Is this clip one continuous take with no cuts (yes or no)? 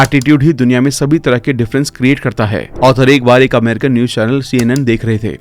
no